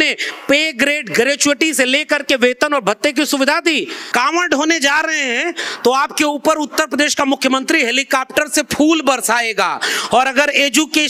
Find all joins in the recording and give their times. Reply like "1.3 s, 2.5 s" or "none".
4.0 s